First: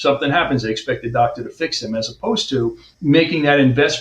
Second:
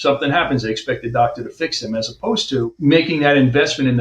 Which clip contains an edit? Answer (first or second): second